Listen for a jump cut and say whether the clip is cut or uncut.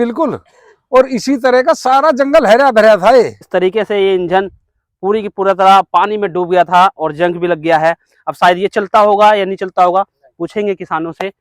cut